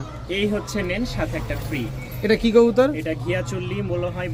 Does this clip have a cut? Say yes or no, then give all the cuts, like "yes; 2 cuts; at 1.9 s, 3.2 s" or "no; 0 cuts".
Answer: no; 0 cuts